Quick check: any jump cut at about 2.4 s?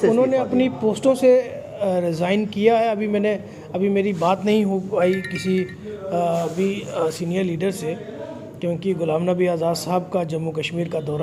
no; 0 cuts

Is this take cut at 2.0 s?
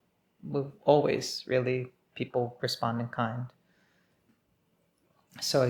no; 1 cut; at 4.3 s

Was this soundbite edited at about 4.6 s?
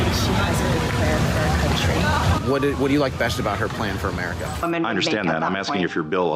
yes; 1 cut; at 4.6 s

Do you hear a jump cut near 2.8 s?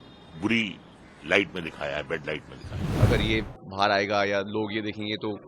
yes; 1 cut; at 2.8 s

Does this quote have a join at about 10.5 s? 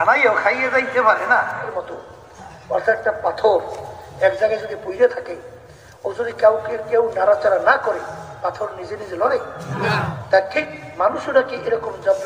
no; 1 cut; at 1.7 s

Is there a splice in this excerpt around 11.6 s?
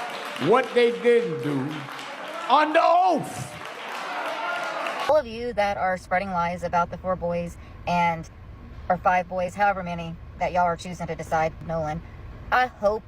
yes; 2 cuts; at 5.1 s, 11.6 s

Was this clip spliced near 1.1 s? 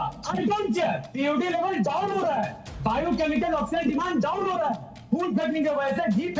yes; 1 cut; at 1.1 s

